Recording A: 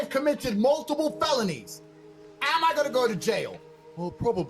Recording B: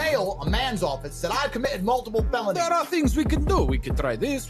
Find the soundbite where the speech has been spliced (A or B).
A